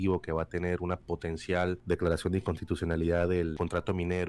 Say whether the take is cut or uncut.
cut